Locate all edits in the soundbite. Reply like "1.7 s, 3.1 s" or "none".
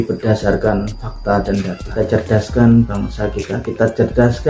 1.8 s